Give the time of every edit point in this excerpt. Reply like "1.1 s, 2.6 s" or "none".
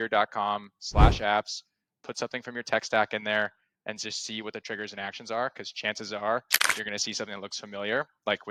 none